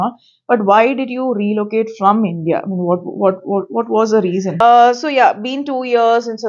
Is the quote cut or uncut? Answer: cut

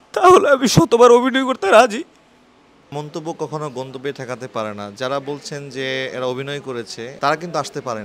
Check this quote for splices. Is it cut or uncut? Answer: cut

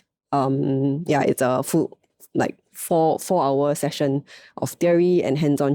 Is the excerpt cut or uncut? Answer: uncut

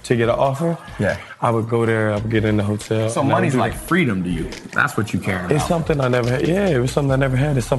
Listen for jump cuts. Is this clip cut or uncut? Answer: uncut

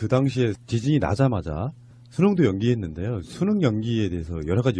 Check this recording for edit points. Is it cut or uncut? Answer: cut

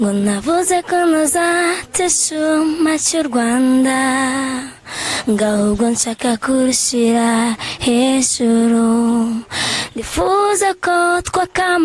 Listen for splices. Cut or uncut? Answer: uncut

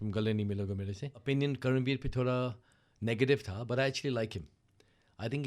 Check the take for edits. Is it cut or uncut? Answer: cut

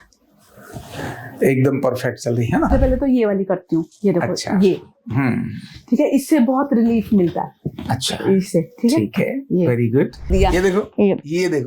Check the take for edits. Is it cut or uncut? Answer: cut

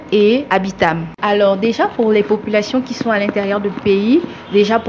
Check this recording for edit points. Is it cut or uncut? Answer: cut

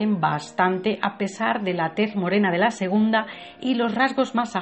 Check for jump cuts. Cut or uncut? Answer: uncut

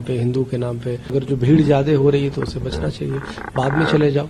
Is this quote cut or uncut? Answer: cut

